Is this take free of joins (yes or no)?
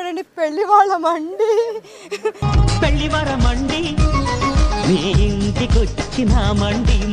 yes